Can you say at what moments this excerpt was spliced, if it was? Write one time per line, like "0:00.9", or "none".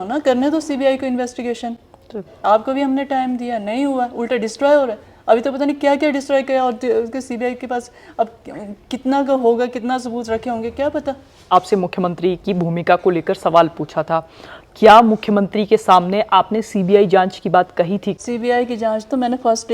0:11.5
0:18.2